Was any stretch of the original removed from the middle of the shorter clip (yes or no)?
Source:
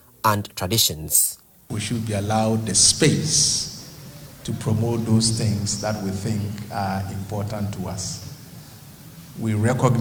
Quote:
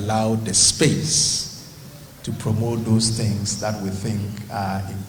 no